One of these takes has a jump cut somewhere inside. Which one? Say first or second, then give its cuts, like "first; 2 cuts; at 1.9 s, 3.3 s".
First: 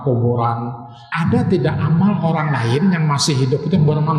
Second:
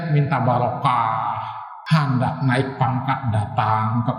first; 1 cut; at 1.0 s